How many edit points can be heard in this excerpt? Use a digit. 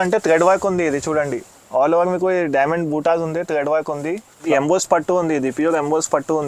1